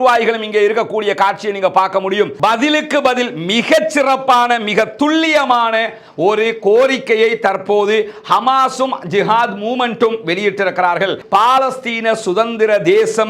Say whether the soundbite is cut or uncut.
cut